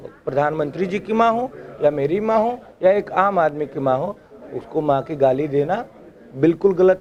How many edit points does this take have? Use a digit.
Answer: 0